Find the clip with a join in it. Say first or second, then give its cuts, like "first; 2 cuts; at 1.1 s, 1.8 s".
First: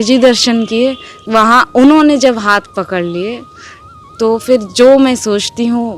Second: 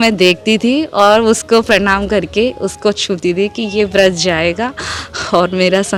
first; 1 cut; at 1.1 s